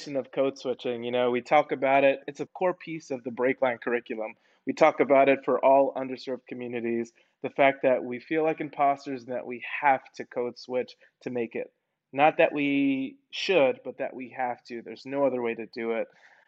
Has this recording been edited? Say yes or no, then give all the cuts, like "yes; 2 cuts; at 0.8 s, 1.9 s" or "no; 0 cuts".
yes; 1 cut; at 2.4 s